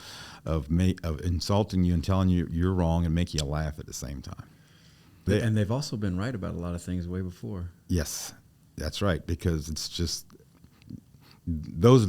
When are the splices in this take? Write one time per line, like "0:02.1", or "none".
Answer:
0:05.3